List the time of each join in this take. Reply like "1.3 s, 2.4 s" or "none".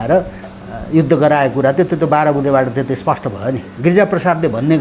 3.7 s